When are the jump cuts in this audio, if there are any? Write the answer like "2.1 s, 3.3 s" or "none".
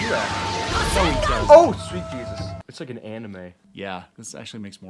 2.6 s